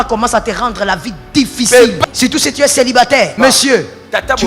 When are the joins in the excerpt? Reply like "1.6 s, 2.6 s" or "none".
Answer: 2.0 s, 3.3 s